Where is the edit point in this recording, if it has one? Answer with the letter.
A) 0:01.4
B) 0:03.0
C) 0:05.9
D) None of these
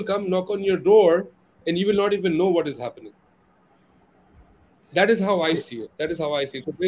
D